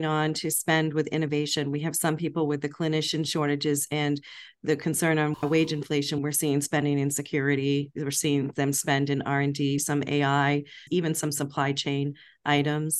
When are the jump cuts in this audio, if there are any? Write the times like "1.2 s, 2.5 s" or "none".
6.2 s, 9.8 s, 10.8 s